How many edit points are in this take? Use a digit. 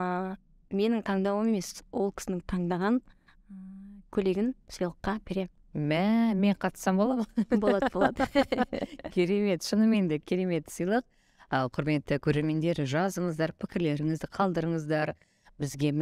0